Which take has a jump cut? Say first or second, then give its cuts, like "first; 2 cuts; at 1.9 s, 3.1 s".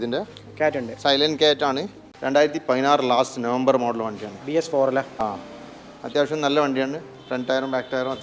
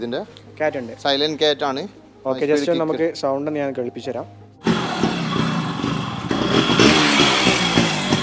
first; 1 cut; at 2.1 s